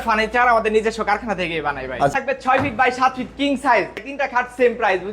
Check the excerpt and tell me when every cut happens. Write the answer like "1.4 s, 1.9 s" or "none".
2.1 s, 4.1 s